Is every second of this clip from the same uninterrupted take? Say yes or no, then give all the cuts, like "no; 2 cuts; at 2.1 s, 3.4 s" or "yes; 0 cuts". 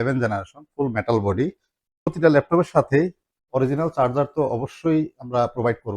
no; 1 cut; at 2.1 s